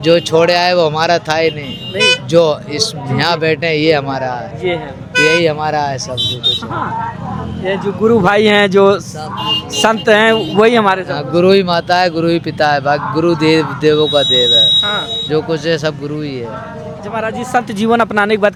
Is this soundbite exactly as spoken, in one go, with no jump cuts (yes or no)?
yes